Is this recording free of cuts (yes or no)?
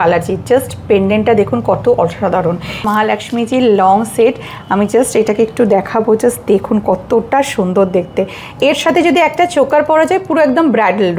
no